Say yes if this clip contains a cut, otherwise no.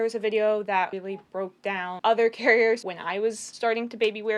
yes